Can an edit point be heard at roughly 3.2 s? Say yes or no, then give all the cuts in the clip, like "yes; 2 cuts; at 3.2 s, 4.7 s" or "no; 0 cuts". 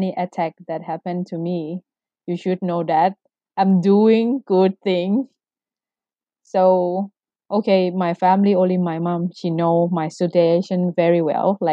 no; 0 cuts